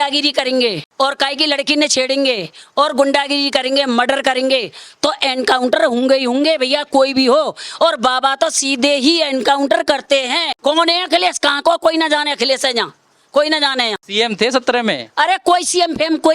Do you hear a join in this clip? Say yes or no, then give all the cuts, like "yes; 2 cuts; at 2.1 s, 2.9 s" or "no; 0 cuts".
yes; 3 cuts; at 0.8 s, 10.5 s, 14.0 s